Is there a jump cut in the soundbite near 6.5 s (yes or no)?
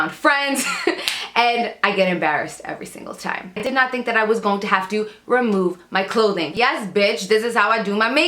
yes